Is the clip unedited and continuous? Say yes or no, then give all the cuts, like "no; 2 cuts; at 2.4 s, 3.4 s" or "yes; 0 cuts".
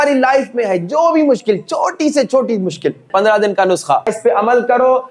no; 2 cuts; at 3.1 s, 4.2 s